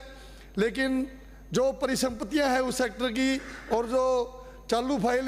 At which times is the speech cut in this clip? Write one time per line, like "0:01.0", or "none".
none